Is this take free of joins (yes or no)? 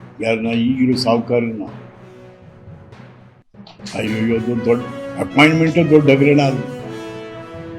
no